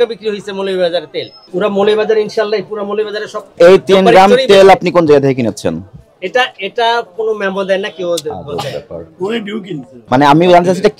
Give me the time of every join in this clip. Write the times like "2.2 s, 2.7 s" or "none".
3.5 s, 9.9 s